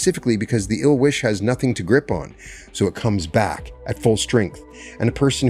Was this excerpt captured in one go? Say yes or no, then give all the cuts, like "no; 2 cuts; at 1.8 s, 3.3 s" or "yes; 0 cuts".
yes; 0 cuts